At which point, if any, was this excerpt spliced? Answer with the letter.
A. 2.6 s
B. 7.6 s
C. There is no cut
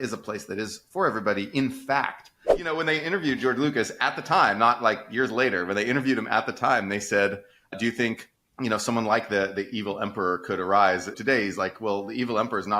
A